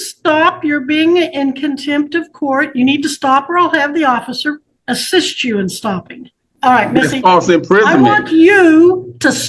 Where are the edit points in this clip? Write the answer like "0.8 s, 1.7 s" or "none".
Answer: 4.7 s, 6.4 s